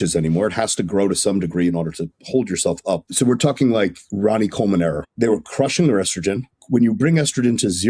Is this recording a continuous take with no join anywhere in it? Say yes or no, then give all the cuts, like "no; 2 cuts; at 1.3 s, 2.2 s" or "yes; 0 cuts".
no; 3 cuts; at 3.1 s, 5.1 s, 6.6 s